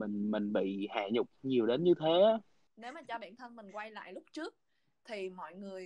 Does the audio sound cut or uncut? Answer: cut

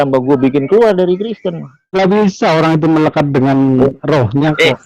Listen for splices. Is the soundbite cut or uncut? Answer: cut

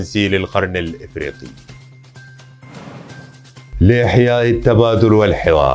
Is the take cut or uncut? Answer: uncut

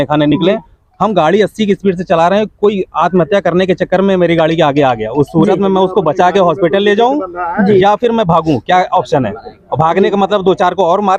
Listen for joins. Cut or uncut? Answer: uncut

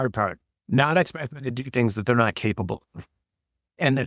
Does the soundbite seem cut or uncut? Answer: uncut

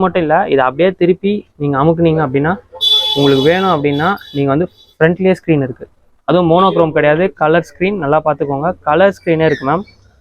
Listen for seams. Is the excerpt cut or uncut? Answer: uncut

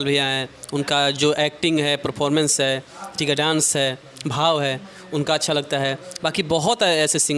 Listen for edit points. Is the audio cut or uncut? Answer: uncut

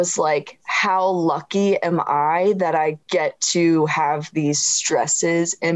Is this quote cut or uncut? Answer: uncut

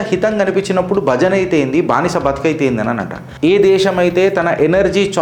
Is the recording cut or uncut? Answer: cut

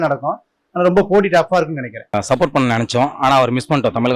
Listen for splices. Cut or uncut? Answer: cut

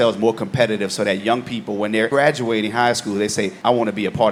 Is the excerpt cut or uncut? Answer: uncut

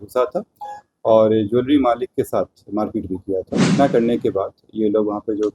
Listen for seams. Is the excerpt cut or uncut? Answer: cut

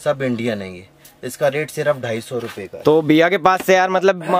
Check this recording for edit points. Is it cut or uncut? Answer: uncut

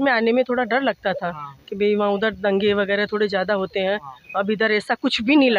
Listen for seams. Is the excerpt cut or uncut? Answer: uncut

